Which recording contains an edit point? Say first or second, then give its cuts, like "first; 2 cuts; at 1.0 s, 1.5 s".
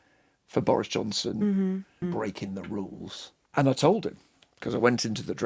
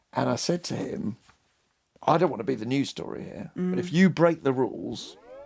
first; 2 cuts; at 2.0 s, 3.4 s